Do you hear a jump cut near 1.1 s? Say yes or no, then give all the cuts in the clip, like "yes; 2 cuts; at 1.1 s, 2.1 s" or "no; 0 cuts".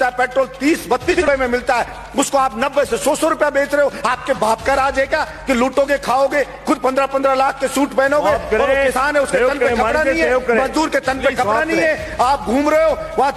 yes; 1 cut; at 1.1 s